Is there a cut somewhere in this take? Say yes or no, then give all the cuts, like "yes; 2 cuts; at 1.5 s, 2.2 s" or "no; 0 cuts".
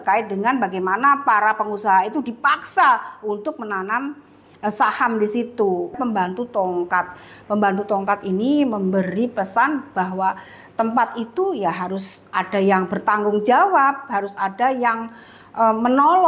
yes; 1 cut; at 6.0 s